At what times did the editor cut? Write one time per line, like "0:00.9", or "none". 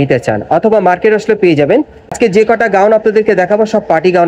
0:02.1

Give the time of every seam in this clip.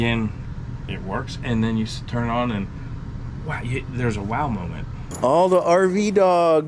0:05.1

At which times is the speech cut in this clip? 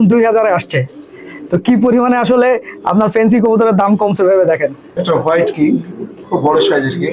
none

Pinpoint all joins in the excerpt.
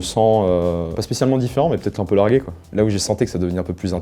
0:01.0
0:02.6

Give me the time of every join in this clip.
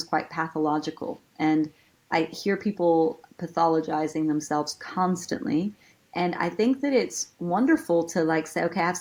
none

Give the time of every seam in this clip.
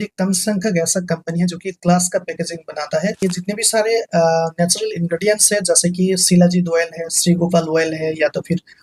0:03.2

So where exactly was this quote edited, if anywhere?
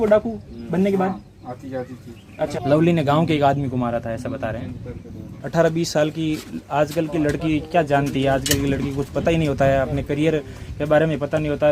0:02.5
0:05.4

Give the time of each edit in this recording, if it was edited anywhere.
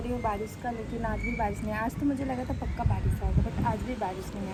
none

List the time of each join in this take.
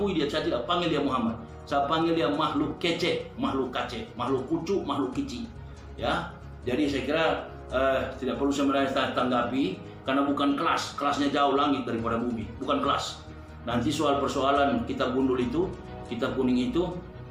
none

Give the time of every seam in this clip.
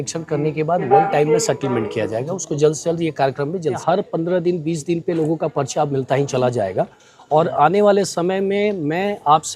0:03.8

